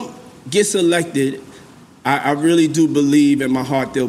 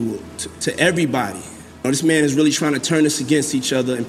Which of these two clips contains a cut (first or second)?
second